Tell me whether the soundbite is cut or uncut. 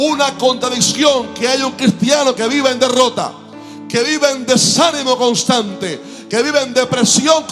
uncut